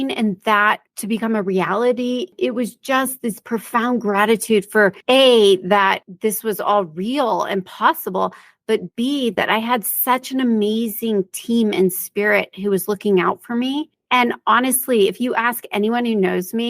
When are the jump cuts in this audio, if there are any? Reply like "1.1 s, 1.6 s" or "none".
0.9 s, 2.3 s, 5.0 s, 6.1 s, 14.0 s